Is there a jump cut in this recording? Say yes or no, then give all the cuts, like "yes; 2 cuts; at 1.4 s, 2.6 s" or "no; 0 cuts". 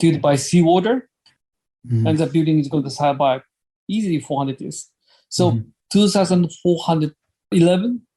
yes; 1 cut; at 1.4 s